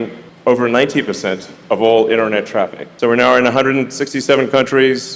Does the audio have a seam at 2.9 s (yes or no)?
yes